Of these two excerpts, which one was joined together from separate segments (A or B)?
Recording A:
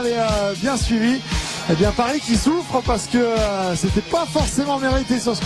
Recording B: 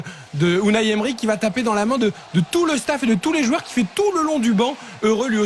A